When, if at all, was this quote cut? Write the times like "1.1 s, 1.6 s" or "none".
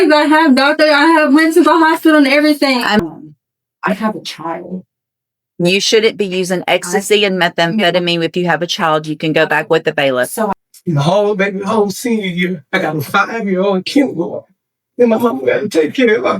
3.0 s, 10.7 s